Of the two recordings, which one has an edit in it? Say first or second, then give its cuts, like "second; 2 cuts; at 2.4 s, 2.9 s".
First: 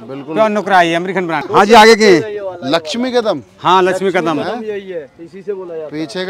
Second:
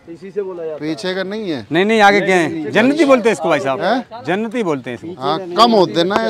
first; 1 cut; at 1.4 s